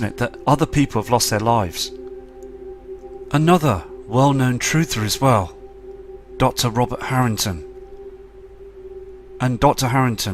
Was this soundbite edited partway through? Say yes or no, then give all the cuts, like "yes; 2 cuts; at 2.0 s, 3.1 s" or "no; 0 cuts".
no; 0 cuts